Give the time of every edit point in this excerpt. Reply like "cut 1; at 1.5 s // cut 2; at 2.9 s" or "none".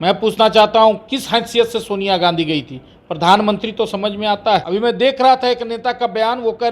cut 1; at 4.7 s